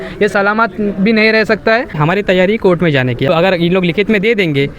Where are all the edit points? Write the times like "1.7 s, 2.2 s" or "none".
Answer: 2.0 s, 3.3 s